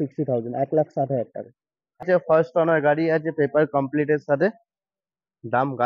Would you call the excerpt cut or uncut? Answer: cut